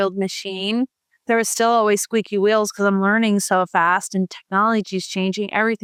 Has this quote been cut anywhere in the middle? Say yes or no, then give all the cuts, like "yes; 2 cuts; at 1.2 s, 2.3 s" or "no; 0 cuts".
no; 0 cuts